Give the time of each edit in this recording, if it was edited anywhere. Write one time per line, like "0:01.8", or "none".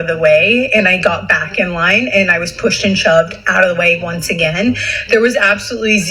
none